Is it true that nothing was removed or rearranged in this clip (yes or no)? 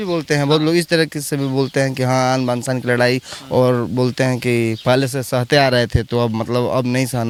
yes